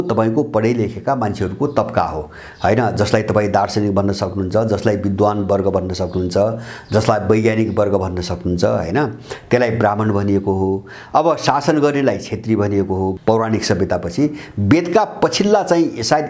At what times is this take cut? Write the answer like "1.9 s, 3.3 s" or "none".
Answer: none